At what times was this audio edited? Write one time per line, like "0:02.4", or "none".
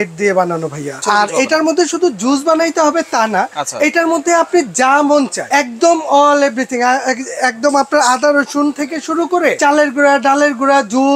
0:01.0
0:05.4
0:09.6